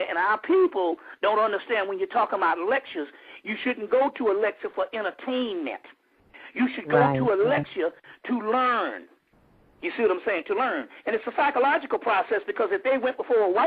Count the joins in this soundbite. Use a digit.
1